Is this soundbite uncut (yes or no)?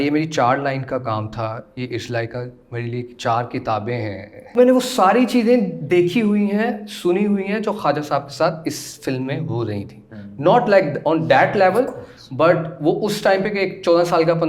no